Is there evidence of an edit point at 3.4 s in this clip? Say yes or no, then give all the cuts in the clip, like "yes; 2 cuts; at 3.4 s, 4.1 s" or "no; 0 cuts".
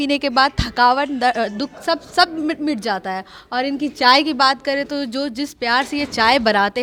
no; 0 cuts